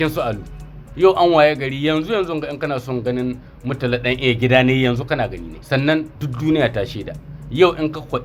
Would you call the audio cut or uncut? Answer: uncut